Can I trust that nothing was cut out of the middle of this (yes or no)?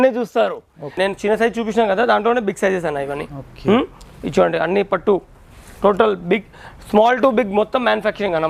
no